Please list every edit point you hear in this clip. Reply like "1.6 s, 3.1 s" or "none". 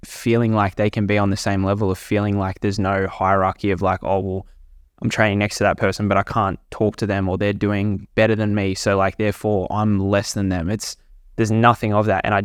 none